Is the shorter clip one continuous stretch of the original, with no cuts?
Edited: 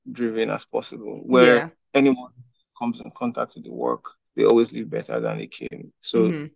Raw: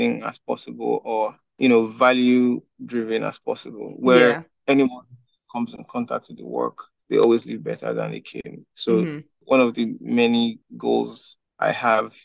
yes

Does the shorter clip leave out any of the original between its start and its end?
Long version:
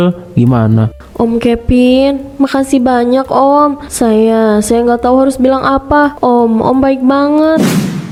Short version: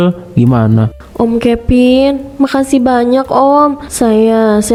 no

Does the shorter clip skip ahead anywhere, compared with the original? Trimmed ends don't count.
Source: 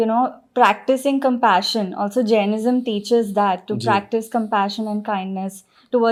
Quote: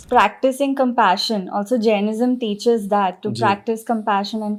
no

